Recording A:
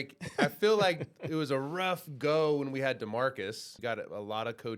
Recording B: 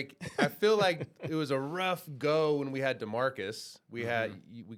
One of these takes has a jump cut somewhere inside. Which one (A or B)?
A